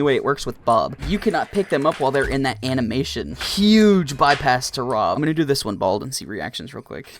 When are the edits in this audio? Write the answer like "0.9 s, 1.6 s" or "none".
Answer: 1.0 s, 3.4 s, 5.2 s